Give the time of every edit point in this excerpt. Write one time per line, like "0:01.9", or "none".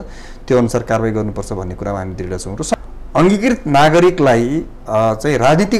0:02.7